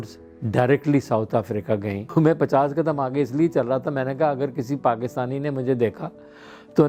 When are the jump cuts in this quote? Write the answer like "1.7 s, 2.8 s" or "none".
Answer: 2.1 s